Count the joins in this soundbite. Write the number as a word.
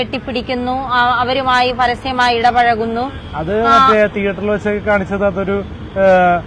zero